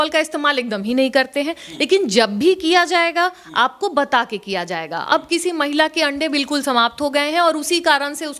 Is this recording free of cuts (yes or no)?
yes